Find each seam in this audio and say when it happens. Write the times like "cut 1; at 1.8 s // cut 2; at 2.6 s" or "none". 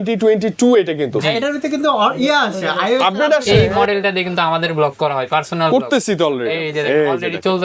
cut 1; at 3.5 s